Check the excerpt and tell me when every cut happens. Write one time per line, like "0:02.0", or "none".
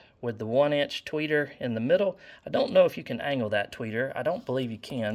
none